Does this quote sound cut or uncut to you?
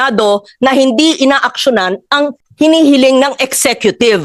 cut